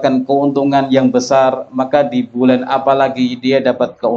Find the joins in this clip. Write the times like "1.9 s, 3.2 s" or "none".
none